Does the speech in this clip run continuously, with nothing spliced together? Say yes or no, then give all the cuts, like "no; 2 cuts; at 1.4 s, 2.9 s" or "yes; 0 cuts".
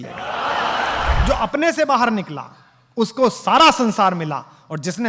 no; 1 cut; at 1.1 s